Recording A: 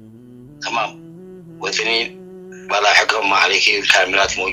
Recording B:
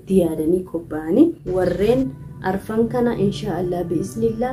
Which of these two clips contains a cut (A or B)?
B